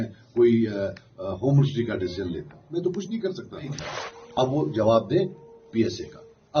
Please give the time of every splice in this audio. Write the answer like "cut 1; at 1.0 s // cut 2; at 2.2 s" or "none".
cut 1; at 3.8 s